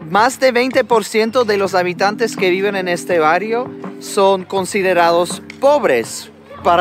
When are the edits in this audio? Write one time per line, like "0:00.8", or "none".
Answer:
none